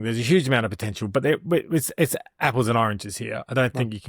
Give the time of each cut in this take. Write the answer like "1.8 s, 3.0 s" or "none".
none